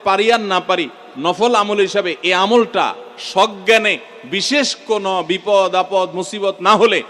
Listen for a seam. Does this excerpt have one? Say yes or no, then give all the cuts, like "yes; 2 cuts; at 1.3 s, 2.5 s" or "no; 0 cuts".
no; 0 cuts